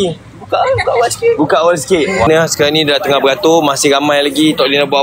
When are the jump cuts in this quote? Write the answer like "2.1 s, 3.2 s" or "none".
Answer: 2.3 s